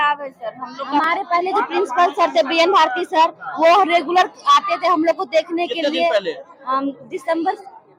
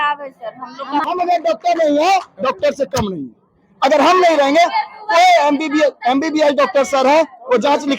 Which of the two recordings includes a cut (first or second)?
second